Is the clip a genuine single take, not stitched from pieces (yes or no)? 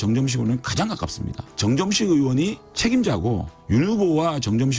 no